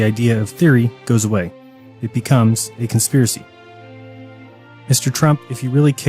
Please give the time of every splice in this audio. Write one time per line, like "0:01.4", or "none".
0:01.0